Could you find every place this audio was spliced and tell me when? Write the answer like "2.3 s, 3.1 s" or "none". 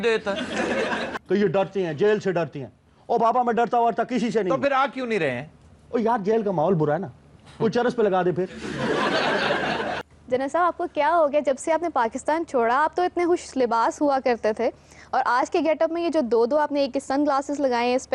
1.1 s, 10.1 s